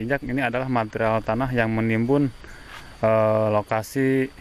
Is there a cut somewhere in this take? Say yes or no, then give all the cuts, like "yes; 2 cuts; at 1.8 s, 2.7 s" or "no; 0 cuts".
no; 0 cuts